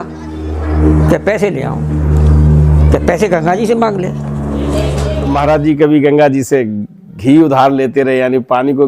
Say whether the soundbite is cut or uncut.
cut